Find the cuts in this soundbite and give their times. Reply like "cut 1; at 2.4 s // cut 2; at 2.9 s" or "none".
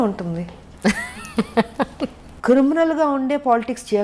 cut 1; at 2.3 s